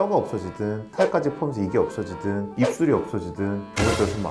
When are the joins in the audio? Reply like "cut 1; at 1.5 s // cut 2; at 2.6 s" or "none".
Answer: none

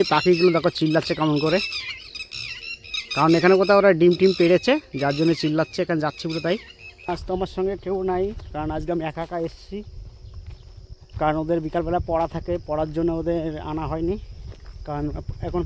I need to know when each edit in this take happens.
cut 1; at 6.9 s

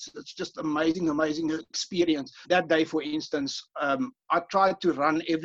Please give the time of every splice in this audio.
cut 1; at 2.3 s

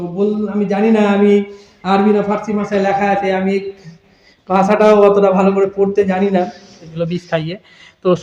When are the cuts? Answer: cut 1; at 6.9 s

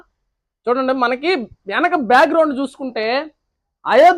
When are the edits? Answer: none

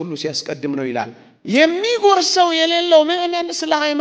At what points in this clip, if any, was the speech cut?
cut 1; at 1.2 s

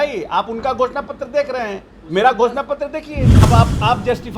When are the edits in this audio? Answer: cut 1; at 3.5 s

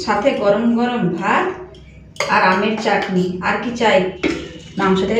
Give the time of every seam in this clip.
cut 1; at 4.1 s

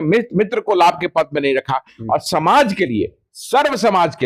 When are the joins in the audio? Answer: none

